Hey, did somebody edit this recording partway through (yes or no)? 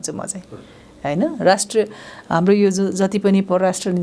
no